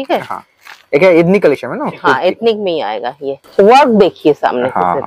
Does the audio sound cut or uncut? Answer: cut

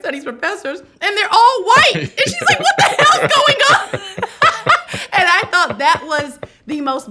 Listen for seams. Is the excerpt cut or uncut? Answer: uncut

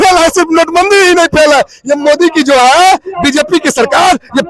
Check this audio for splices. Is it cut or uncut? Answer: uncut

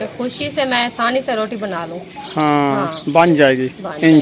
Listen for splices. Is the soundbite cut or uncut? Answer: uncut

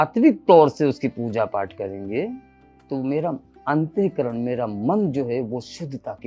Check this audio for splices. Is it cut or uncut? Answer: uncut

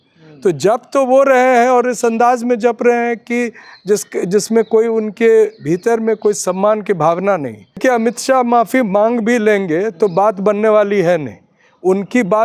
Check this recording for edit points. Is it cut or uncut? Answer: cut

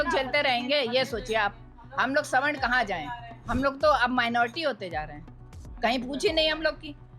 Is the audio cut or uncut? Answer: uncut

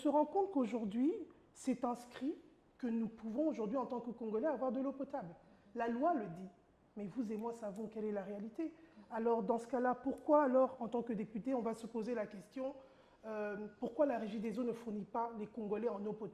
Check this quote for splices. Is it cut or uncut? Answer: uncut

